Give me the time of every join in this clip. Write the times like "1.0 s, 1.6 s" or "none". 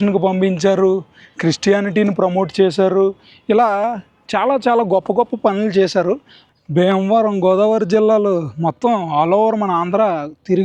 6.3 s